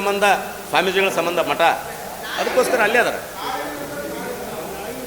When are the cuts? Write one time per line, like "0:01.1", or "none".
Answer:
none